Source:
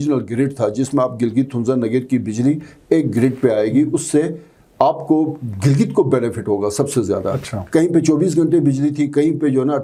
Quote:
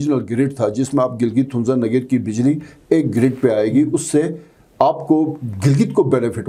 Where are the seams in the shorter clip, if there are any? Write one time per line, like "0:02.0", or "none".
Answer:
none

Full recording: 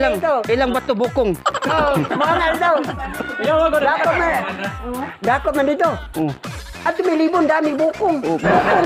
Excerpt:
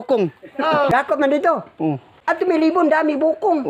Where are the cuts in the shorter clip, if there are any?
0:00.9
0:02.1

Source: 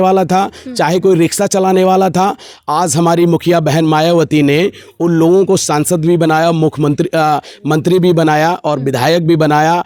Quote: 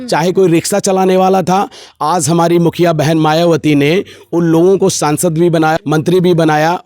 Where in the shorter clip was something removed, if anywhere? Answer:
0:05.8

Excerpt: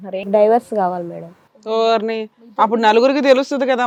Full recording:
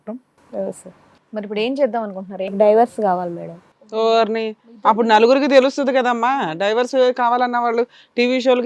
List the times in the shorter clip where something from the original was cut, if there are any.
none

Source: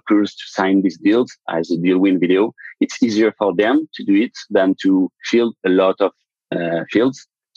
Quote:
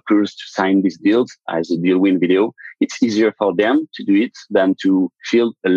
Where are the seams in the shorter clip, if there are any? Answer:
none

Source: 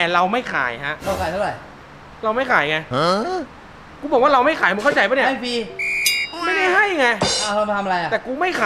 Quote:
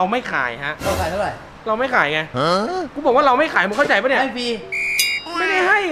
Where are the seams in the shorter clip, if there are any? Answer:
0:01.5
0:02.9

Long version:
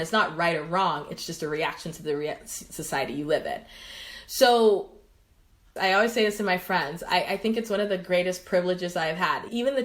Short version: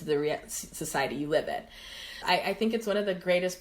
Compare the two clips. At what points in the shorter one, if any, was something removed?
0:02.1

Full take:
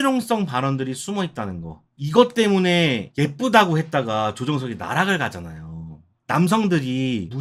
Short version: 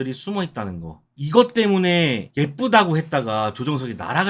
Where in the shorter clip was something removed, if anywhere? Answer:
none

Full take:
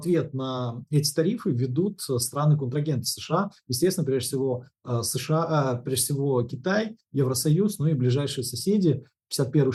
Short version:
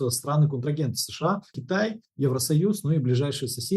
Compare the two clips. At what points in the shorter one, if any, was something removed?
0:01.6

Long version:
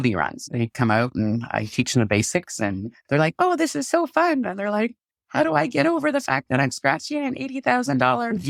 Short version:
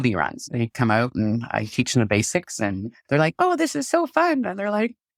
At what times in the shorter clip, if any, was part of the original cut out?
none

